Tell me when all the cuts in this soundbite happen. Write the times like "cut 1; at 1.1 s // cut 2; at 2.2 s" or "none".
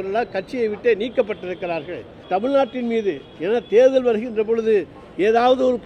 cut 1; at 2.2 s